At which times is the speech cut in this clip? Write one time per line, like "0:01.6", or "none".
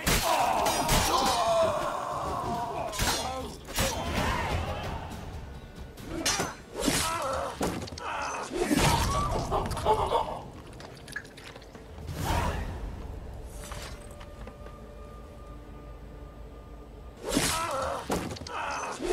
0:17.1